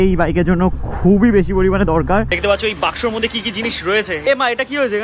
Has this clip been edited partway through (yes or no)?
yes